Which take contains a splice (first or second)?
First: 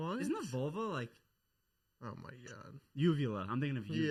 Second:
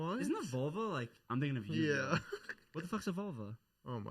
second